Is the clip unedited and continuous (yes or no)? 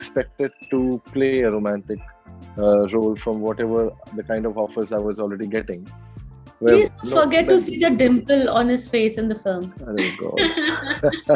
yes